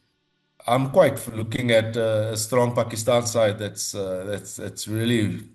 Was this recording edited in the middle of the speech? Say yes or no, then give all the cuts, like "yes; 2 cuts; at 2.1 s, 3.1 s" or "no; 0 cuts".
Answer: no; 0 cuts